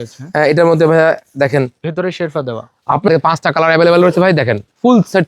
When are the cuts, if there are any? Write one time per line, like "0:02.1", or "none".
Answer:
0:03.1